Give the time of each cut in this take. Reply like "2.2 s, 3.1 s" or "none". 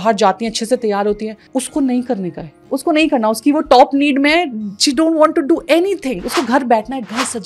none